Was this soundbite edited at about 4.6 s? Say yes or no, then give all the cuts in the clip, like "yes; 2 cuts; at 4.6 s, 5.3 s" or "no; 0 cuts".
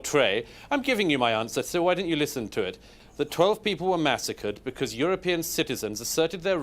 no; 1 cut; at 2.9 s